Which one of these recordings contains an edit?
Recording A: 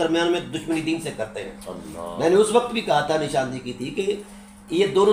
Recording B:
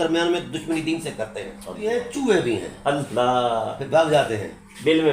B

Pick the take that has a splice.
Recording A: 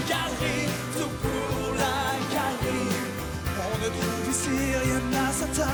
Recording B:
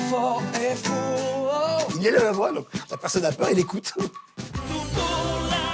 B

